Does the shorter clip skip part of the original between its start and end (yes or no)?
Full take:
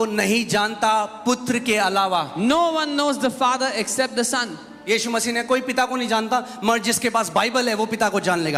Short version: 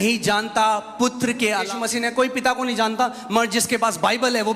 yes